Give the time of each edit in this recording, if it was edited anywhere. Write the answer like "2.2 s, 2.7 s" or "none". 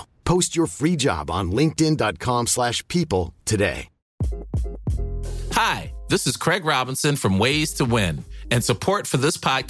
4.0 s, 5.4 s